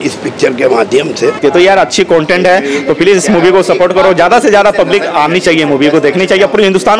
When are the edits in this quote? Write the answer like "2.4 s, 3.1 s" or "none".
1.4 s